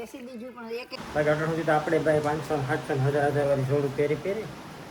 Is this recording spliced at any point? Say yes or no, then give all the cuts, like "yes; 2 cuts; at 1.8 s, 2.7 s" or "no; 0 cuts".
yes; 1 cut; at 0.9 s